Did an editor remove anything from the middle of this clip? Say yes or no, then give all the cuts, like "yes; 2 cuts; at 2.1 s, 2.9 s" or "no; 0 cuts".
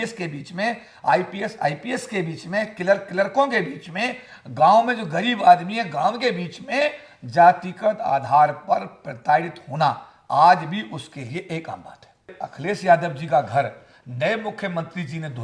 yes; 1 cut; at 12.3 s